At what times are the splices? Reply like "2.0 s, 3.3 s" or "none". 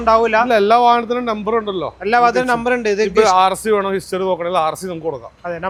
none

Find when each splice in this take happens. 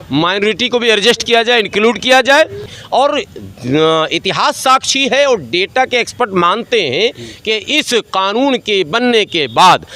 2.7 s

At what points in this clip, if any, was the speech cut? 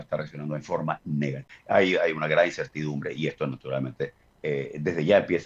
1.5 s, 4.3 s

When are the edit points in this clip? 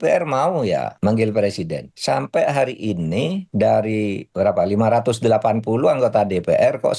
0.9 s, 1.9 s, 3.4 s, 4.2 s

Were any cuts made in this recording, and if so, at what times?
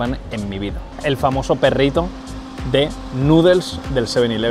none

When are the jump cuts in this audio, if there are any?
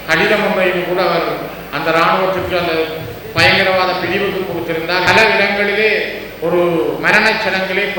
5.1 s

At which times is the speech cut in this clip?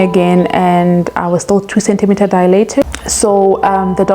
2.9 s

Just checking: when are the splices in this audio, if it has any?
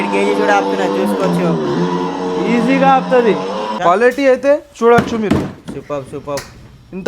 3.7 s

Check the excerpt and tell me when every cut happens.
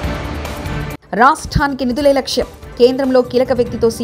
1.0 s

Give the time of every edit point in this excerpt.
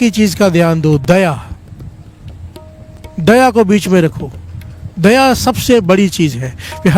none

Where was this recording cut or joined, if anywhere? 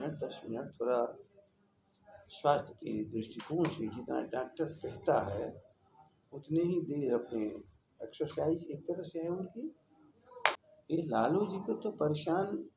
10.6 s

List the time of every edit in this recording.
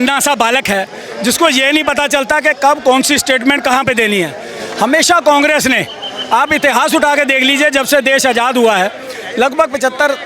none

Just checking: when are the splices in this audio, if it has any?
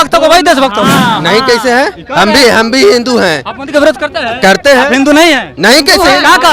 1.2 s

